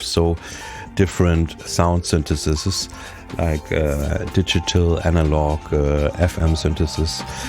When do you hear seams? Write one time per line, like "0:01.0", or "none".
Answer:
0:01.7